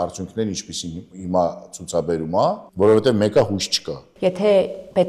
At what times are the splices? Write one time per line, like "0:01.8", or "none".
0:02.6
0:04.1